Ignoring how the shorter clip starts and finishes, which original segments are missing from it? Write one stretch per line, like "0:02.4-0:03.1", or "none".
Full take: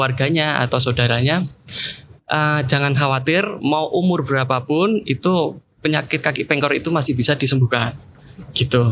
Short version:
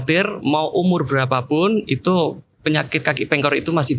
none